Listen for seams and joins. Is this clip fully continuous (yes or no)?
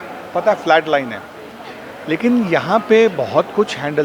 yes